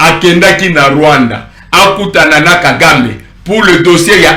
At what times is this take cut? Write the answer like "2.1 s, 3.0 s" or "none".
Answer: none